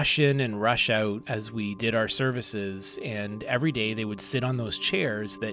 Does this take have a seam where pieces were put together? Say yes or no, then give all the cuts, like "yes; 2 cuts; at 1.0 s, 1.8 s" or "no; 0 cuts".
yes; 1 cut; at 1.2 s